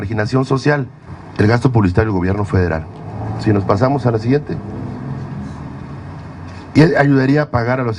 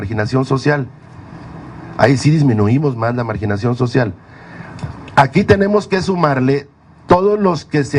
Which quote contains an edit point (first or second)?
second